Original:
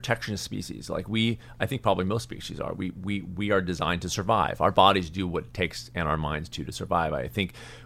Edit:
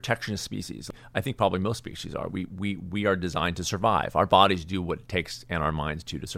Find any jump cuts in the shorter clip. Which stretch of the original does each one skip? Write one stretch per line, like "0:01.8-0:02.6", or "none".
0:00.9-0:01.4